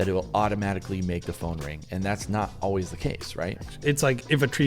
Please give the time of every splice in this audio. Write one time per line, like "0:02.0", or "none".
0:03.7